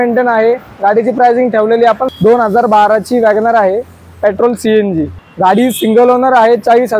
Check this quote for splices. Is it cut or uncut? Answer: cut